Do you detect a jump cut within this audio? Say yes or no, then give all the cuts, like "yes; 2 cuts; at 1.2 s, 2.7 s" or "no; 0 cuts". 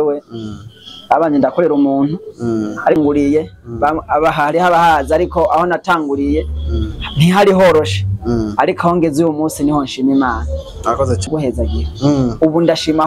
yes; 2 cuts; at 3.0 s, 11.3 s